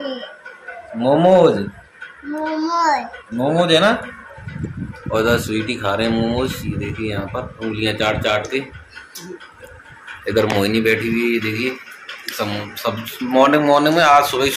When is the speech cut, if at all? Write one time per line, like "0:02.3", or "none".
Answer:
none